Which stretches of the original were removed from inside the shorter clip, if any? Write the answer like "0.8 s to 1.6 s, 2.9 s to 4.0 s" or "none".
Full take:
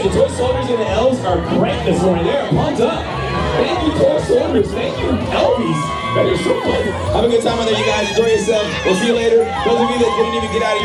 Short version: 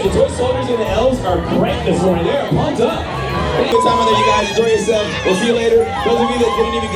3.7 s to 7.3 s